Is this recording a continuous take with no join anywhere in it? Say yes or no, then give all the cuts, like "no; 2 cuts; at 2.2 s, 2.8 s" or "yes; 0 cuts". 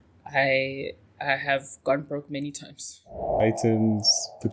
no; 1 cut; at 3.4 s